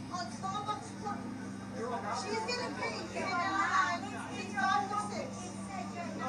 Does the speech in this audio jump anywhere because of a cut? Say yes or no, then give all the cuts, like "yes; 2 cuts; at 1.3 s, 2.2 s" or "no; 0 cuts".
no; 0 cuts